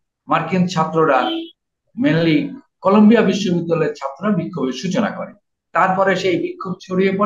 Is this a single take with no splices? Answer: yes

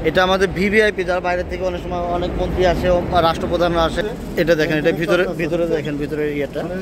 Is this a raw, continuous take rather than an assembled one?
no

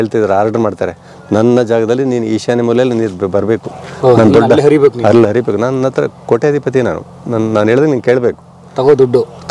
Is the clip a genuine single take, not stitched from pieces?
yes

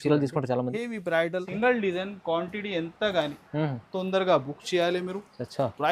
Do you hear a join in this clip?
yes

